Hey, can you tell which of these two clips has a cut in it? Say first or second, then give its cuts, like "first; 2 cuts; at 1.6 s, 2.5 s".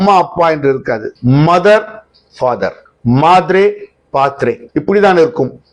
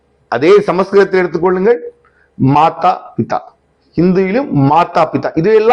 first; 3 cuts; at 1.1 s, 2.9 s, 4.6 s